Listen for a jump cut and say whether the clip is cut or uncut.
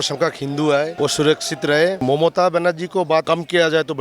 cut